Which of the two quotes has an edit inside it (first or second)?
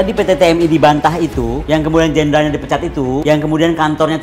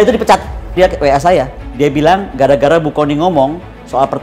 second